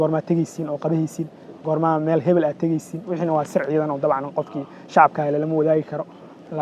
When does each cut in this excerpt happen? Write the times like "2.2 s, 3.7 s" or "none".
none